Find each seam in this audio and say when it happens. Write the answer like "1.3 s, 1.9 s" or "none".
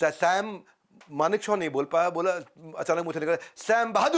none